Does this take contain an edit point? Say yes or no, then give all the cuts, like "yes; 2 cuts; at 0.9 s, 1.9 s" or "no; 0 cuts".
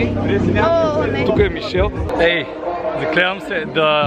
yes; 1 cut; at 2.0 s